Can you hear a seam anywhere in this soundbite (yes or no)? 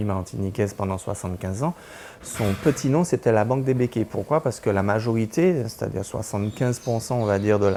no